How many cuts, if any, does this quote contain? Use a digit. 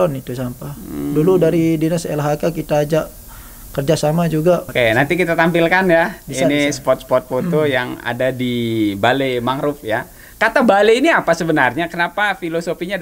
1